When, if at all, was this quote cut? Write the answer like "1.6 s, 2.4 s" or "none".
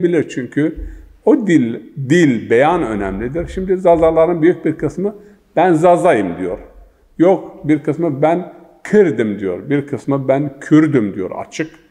none